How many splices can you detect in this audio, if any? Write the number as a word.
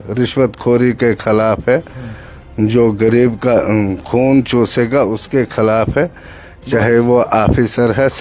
zero